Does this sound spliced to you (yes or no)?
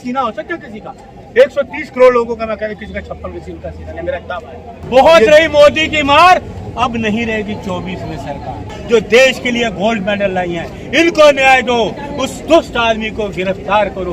yes